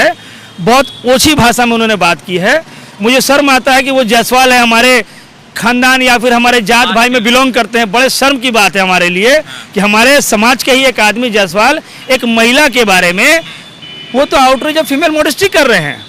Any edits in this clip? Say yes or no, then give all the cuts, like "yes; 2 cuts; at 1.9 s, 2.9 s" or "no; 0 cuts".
no; 0 cuts